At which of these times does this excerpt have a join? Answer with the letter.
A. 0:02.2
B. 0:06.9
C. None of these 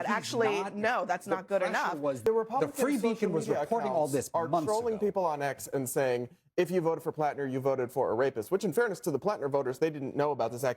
A